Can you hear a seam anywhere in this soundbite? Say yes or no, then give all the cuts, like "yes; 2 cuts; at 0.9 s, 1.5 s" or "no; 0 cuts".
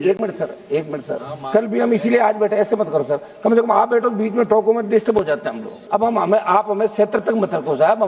yes; 1 cut; at 5.8 s